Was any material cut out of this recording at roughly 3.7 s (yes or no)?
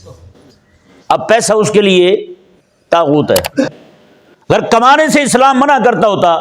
yes